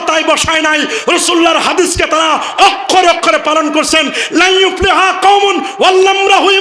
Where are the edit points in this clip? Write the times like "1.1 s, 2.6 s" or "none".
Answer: none

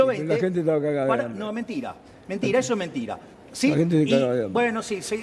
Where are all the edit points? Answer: none

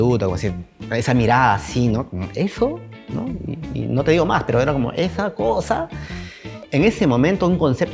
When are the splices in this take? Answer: 6.5 s

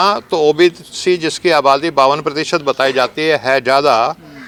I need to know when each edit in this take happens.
none

